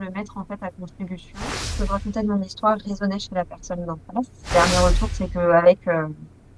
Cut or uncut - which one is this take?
cut